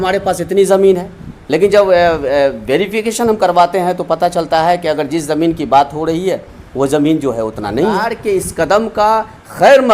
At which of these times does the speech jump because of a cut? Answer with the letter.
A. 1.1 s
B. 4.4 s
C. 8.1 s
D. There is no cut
C